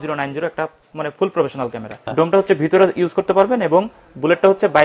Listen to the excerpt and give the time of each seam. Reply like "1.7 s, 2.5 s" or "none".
2.0 s